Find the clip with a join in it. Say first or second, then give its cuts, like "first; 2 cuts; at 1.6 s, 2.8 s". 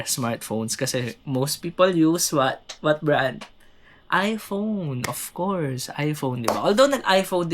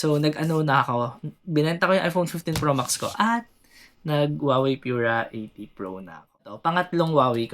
second; 1 cut; at 6.5 s